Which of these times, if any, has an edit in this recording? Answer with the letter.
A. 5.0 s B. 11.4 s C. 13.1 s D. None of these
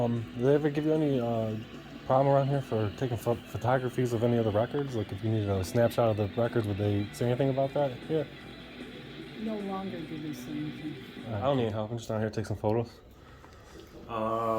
B